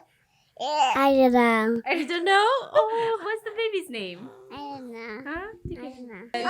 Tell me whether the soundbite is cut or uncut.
uncut